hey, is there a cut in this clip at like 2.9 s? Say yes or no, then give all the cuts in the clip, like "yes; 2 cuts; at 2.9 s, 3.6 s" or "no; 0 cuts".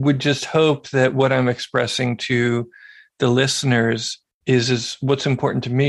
no; 0 cuts